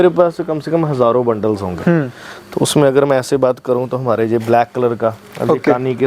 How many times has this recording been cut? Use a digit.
0